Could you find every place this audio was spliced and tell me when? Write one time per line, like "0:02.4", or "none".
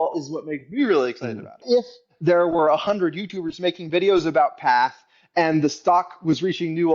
0:01.6